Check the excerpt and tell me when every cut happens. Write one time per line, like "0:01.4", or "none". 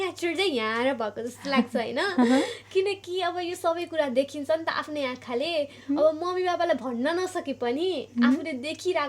none